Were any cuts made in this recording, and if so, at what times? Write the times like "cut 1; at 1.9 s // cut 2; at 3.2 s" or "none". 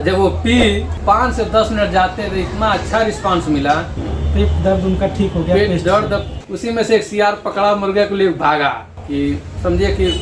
cut 1; at 0.9 s // cut 2; at 4.0 s // cut 3; at 6.4 s // cut 4; at 8.9 s